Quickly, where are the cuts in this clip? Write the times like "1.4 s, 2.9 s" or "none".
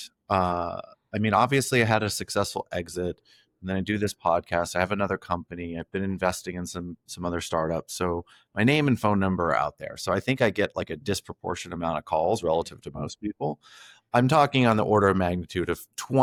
none